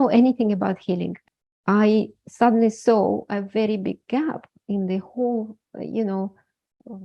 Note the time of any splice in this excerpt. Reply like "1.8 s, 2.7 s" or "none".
1.1 s